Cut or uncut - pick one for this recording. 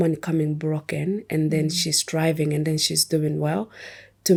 uncut